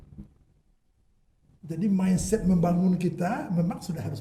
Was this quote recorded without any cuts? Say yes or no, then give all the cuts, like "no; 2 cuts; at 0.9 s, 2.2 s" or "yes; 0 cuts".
yes; 0 cuts